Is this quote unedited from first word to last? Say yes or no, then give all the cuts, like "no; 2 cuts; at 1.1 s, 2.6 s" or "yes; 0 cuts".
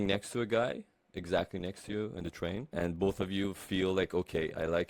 no; 1 cut; at 2.7 s